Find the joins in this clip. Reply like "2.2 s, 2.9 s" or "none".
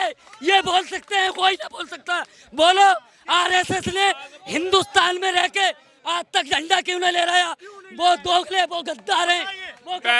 none

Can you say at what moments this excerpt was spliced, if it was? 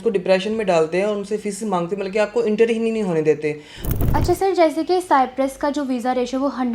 3.7 s

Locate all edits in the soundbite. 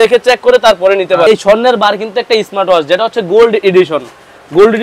1.3 s

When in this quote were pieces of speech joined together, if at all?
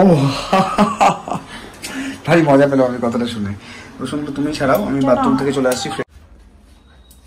6.0 s

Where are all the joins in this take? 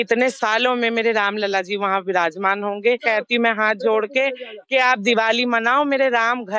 3.0 s

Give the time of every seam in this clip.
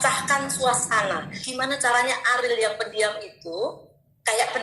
1.3 s

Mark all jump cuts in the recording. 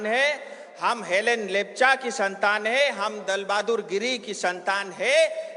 none

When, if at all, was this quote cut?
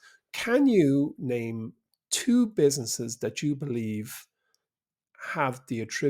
none

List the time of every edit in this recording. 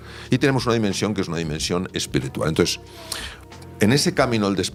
none

